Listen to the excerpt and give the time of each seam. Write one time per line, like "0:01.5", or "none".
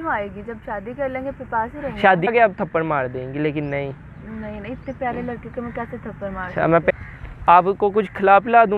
0:02.3
0:06.9